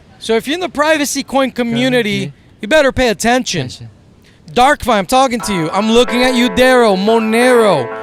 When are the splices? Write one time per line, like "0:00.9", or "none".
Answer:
none

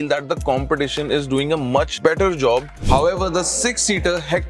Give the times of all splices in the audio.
0:01.9
0:02.8

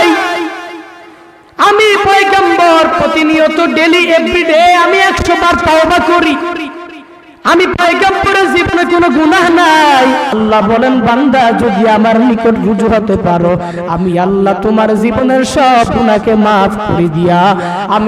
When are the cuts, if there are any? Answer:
0:10.3

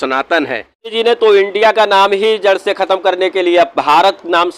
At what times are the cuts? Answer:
0:00.9

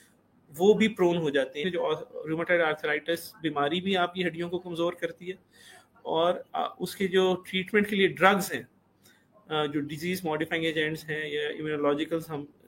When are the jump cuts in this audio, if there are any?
0:01.6

